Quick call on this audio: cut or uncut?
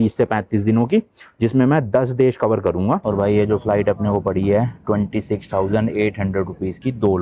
cut